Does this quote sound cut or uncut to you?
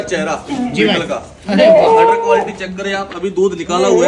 uncut